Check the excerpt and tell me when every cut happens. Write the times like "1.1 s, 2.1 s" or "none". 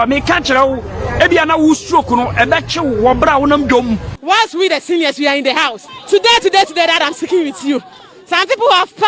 4.1 s